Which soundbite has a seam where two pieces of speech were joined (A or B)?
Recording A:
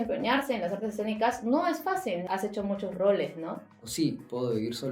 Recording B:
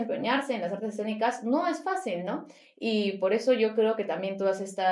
A